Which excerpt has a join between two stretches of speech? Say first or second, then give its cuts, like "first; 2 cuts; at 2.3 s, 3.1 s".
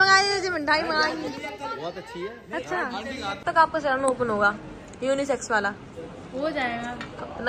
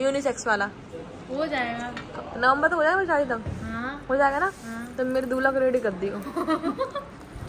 first; 1 cut; at 3.4 s